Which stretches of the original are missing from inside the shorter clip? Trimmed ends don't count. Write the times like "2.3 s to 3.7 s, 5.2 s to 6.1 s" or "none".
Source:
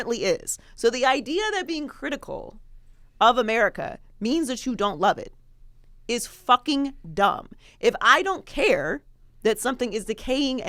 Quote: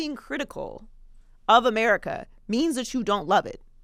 none